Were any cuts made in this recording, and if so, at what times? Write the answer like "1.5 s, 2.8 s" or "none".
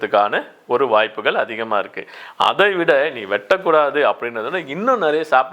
none